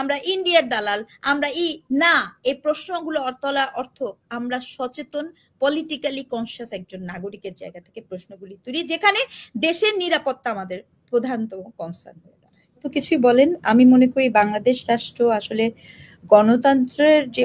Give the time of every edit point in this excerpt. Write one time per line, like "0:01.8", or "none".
none